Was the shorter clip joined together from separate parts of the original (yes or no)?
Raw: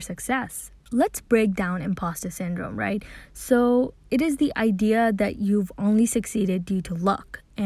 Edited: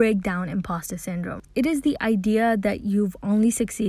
yes